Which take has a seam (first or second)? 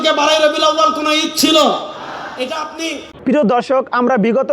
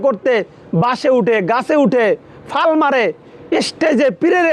first